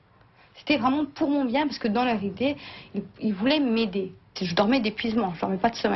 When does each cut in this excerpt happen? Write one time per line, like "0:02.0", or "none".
0:04.2